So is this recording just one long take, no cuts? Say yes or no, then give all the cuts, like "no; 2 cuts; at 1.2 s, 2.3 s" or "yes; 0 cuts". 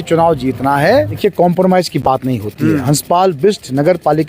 no; 1 cut; at 1.2 s